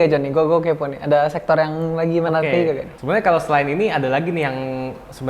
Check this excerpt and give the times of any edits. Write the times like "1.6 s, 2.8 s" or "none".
2.9 s